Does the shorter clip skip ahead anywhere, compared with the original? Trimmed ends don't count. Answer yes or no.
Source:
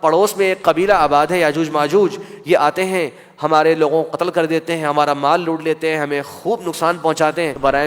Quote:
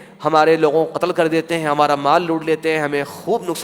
no